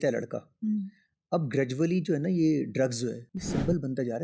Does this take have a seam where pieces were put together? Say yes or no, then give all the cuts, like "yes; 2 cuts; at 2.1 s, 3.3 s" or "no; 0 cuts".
yes; 1 cut; at 3.3 s